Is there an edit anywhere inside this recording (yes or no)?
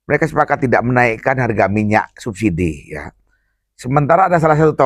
no